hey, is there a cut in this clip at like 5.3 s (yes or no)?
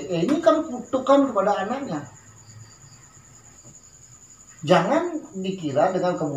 no